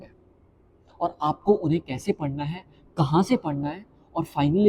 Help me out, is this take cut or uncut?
uncut